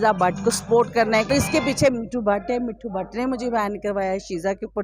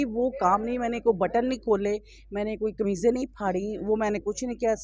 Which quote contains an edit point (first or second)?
first